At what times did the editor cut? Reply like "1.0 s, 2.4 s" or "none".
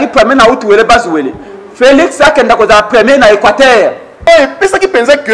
4.3 s